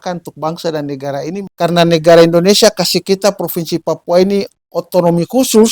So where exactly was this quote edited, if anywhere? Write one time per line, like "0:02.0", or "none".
0:01.4